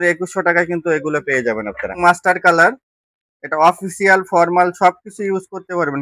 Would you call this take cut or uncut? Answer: cut